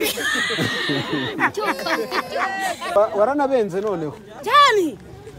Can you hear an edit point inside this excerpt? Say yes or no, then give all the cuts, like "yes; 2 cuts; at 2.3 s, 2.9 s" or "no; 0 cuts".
yes; 1 cut; at 3.0 s